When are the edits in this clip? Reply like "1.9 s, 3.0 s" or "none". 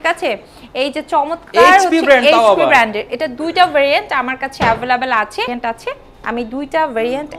5.5 s